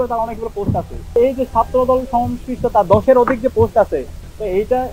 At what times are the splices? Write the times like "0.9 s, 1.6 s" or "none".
1.2 s